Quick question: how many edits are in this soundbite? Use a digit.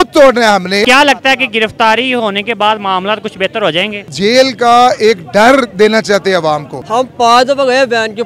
3